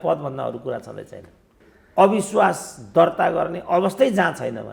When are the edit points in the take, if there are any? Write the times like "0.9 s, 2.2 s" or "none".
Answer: 1.6 s